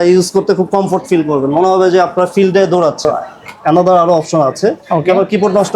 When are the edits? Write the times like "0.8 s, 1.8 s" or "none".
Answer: 3.1 s